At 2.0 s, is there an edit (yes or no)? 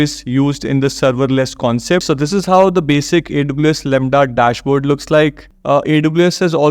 yes